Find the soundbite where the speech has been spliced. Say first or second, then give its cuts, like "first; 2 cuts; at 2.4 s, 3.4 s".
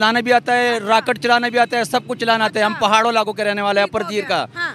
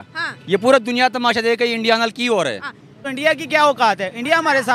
second; 1 cut; at 3.1 s